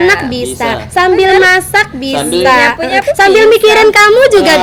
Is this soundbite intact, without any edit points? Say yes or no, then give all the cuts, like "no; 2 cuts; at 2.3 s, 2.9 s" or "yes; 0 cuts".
yes; 0 cuts